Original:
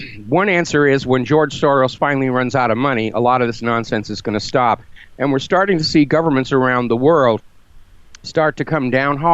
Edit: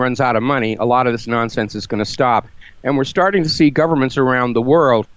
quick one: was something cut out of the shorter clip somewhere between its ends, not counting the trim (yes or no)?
no